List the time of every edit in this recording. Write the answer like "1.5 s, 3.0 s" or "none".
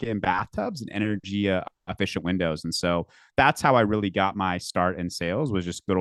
none